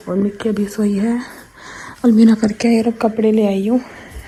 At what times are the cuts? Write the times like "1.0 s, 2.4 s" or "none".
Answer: none